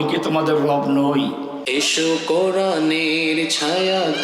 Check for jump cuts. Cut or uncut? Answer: cut